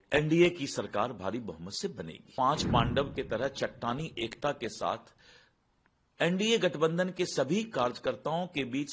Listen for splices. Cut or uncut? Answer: cut